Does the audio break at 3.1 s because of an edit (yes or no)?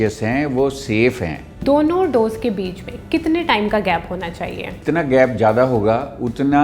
no